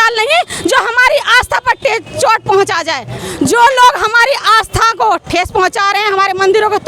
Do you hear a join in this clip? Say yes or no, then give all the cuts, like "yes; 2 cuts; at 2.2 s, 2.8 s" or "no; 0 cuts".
yes; 1 cut; at 3.2 s